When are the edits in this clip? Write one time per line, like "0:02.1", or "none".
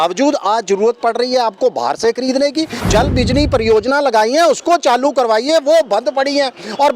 0:02.9

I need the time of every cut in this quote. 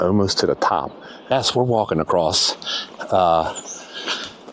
0:01.3

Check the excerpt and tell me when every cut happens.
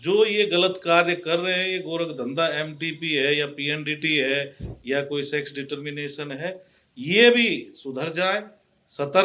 none

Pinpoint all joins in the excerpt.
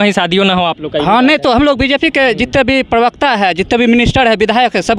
none

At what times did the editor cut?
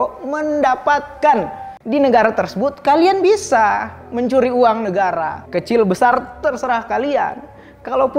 0:01.7

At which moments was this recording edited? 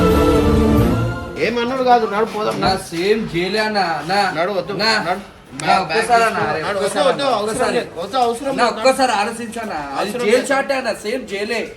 0:01.3

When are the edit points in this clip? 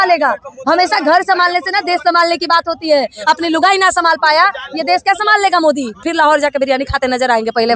0:06.0

